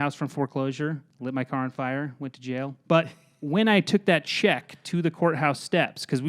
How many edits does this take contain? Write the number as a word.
two